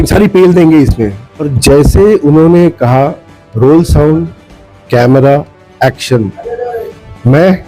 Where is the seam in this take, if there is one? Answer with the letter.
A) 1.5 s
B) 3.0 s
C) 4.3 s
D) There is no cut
A